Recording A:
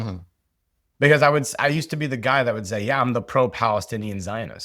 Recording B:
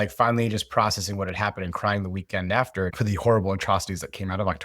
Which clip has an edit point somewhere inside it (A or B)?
B